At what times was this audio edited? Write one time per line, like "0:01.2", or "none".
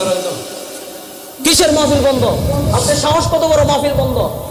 none